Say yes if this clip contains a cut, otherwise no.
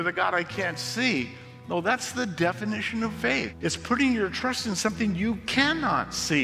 yes